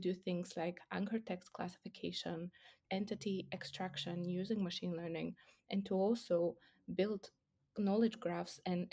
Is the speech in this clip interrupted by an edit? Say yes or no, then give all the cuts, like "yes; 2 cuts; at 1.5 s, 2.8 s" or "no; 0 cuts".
yes; 1 cut; at 2.8 s